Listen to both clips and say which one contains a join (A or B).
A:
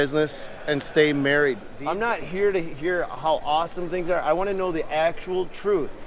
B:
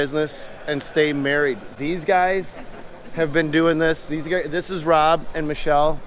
A